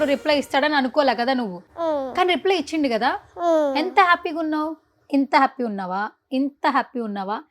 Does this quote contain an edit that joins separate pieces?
yes; 1 cut; at 1.6 s

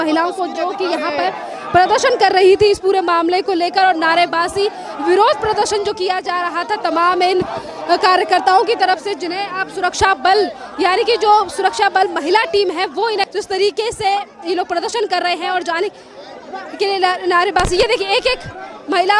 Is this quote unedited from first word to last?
no; 1 cut; at 13.4 s

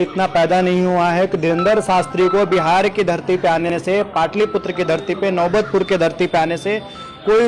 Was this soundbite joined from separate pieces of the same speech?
no; 0 cuts

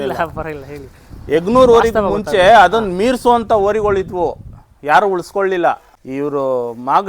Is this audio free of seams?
no; 1 cut; at 6.0 s

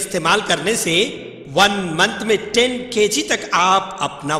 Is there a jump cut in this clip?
no; 0 cuts

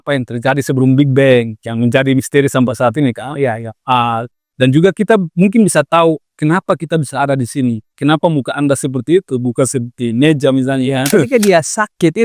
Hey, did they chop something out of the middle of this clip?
yes; 1 cut; at 11.3 s

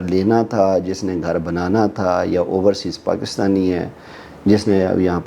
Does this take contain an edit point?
no; 0 cuts

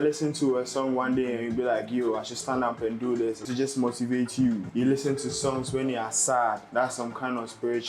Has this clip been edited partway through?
yes; 3 cuts; at 3.4 s, 4.7 s, 6.6 s

